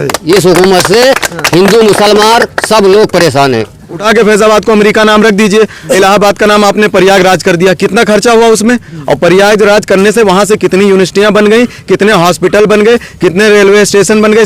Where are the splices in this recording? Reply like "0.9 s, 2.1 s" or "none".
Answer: 4.0 s, 5.9 s

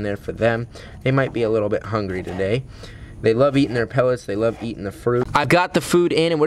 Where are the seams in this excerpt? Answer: none

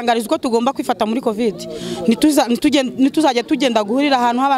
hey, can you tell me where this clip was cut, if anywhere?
none

